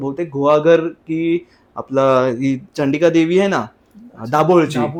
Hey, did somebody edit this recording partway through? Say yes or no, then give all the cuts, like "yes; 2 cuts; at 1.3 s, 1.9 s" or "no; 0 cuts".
no; 0 cuts